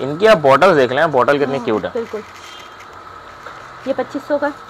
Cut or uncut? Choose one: uncut